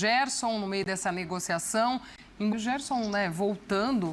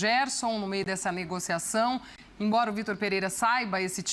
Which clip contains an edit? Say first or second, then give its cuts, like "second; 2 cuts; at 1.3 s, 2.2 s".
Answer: first; 1 cut; at 2.5 s